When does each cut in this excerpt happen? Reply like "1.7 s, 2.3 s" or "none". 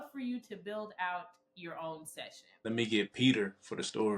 2.4 s